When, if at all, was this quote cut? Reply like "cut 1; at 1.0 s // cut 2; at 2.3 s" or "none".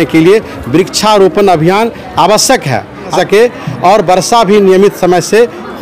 cut 1; at 3.1 s

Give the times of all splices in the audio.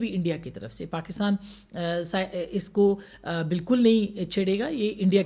none

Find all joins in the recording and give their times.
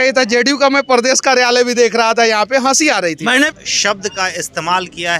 cut 1; at 3.5 s

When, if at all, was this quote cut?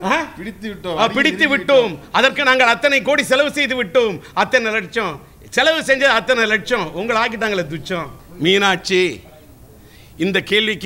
cut 1; at 8.2 s

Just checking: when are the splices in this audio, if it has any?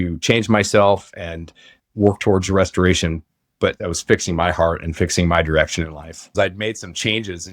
cut 1; at 1.8 s // cut 2; at 3.8 s // cut 3; at 6.3 s

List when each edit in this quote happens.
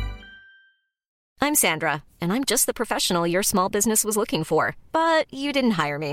cut 1; at 1.2 s

